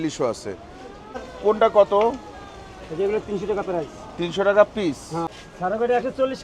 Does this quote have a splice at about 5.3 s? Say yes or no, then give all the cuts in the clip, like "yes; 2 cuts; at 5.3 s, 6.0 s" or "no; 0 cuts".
yes; 2 cuts; at 1.2 s, 5.3 s